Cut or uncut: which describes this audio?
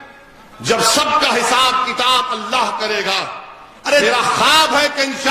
cut